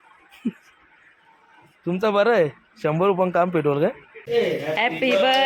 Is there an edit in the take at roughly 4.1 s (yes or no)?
yes